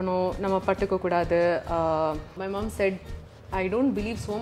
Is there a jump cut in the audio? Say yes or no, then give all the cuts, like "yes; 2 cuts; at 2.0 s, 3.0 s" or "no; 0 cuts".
yes; 1 cut; at 2.4 s